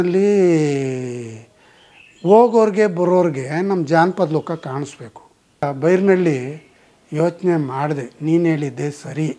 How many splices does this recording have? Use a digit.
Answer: 1